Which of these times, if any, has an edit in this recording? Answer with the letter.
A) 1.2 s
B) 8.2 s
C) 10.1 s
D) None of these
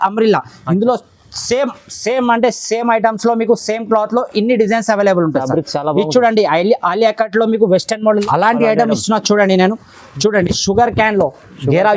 B